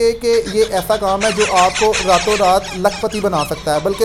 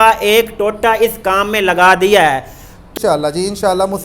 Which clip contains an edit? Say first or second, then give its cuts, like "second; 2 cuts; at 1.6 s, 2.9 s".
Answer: second; 1 cut; at 2.8 s